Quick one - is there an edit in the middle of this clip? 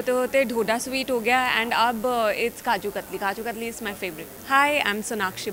yes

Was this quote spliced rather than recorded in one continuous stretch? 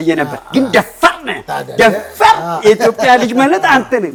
no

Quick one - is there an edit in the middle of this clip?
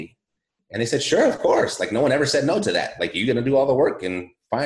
no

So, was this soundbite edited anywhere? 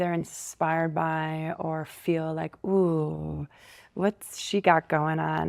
no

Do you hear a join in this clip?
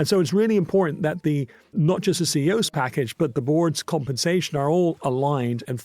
no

